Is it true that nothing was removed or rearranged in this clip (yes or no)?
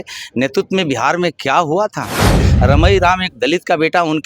no